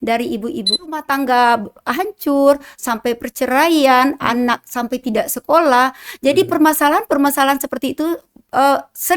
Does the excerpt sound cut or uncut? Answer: cut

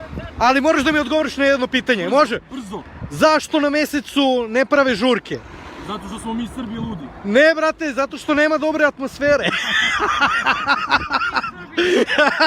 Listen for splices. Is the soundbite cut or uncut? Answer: uncut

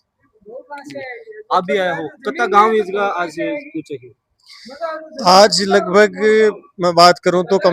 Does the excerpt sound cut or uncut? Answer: uncut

